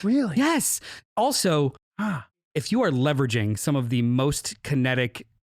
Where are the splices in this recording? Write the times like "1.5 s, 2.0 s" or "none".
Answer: 2.4 s